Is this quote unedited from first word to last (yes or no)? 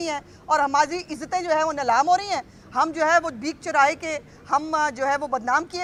yes